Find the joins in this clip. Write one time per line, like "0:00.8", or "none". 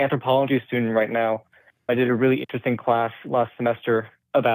0:01.7